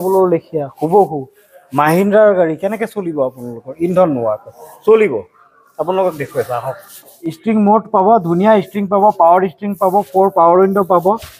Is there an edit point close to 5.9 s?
no; 1 cut; at 7.2 s

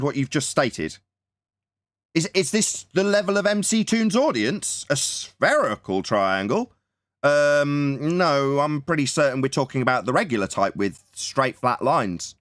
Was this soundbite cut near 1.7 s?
no; 0 cuts

